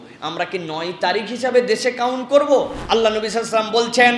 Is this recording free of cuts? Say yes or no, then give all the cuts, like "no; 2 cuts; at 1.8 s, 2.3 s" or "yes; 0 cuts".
no; 1 cut; at 2.8 s